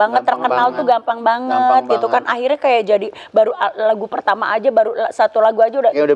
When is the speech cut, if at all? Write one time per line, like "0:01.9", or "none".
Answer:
none